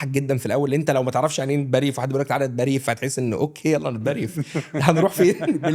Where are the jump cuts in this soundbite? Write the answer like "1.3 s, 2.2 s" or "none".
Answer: none